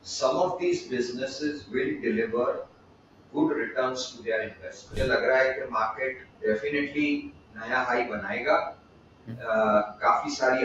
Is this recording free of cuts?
no; 1 cut; at 4.8 s

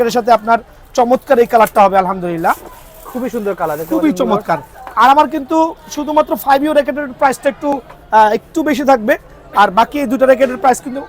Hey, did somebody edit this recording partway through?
no; 0 cuts

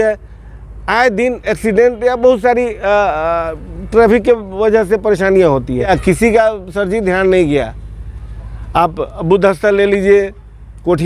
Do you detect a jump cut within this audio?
yes; 1 cut; at 5.9 s

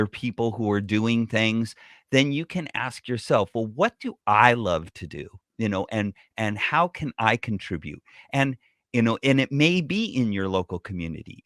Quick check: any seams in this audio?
no; 0 cuts

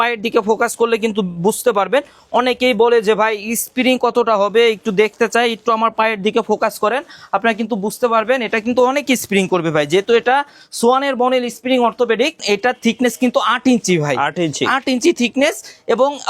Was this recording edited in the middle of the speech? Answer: yes; 1 cut; at 12.4 s

